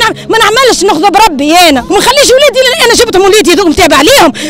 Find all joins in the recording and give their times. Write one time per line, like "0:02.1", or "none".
0:01.8